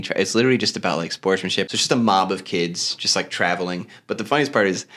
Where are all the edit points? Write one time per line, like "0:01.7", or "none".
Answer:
0:01.7